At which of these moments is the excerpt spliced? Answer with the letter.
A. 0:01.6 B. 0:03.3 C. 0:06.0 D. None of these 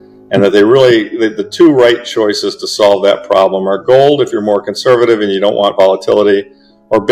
D